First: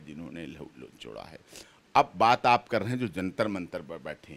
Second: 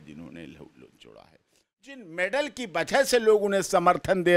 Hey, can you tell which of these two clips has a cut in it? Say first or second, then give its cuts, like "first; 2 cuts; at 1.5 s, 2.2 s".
second; 1 cut; at 1.7 s